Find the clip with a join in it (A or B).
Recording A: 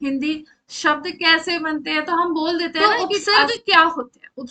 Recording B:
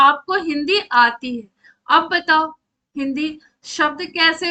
A